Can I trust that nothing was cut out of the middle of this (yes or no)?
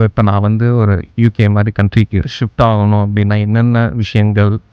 no